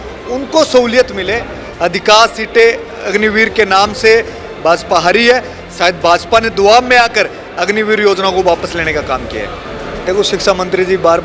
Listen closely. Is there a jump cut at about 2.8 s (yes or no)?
no